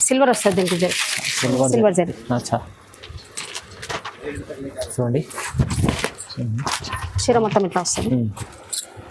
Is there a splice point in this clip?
no; 0 cuts

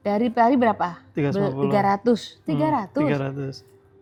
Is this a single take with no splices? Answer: yes; 0 cuts

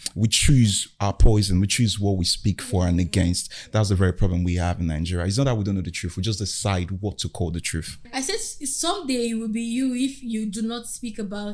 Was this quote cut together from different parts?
yes; 1 cut; at 8.0 s

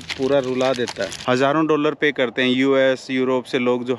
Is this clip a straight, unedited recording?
no; 1 cut; at 1.1 s

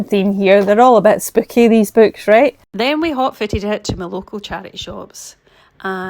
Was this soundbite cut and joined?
yes; 1 cut; at 2.7 s

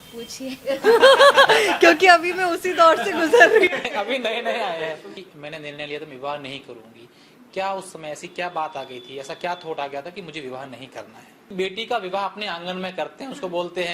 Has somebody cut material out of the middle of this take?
yes; 2 cuts; at 5.1 s, 11.3 s

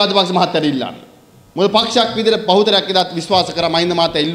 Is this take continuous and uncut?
yes; 0 cuts

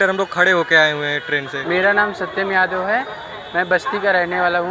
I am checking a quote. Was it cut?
yes; 1 cut; at 1.5 s

